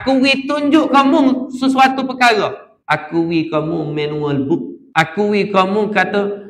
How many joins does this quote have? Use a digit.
2